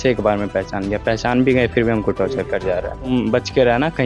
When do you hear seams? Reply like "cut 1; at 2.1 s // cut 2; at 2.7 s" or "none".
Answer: cut 1; at 3.1 s

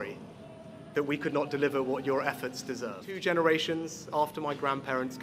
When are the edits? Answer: cut 1; at 3.1 s

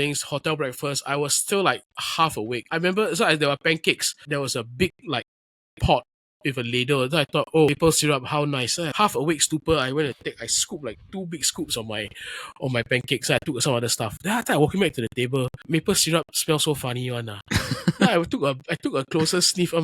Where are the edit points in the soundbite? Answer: cut 1; at 2.5 s // cut 2; at 4.2 s // cut 3; at 7.7 s // cut 4; at 8.9 s // cut 5; at 15.6 s

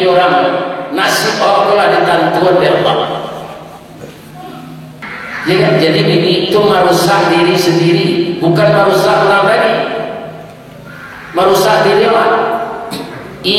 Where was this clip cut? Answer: cut 1; at 5.0 s

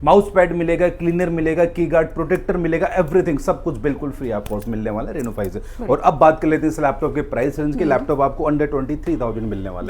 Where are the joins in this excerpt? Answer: none

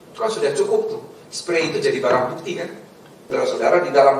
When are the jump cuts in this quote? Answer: cut 1; at 3.2 s

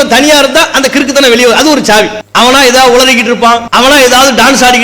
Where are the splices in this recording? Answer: cut 1; at 2.2 s // cut 2; at 3.7 s

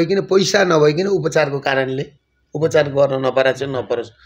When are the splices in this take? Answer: none

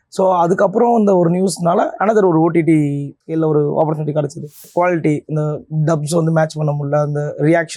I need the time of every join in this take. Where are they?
cut 1; at 3.3 s // cut 2; at 4.7 s

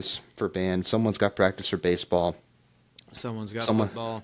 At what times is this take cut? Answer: none

